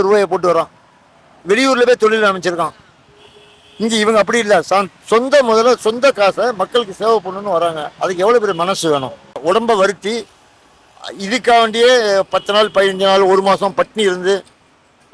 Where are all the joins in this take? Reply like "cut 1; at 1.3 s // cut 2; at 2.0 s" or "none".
cut 1; at 9.4 s